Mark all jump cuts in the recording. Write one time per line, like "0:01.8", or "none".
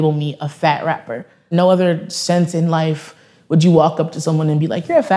0:01.5